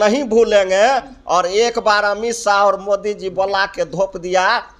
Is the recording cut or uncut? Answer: uncut